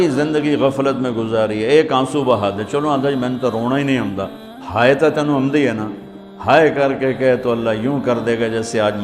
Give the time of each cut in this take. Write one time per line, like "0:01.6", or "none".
none